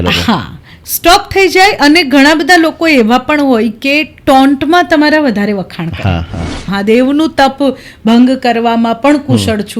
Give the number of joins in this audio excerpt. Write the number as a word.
one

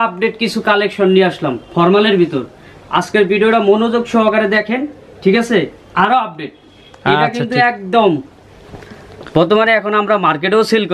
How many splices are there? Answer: zero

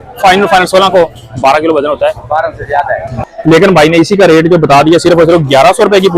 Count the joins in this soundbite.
one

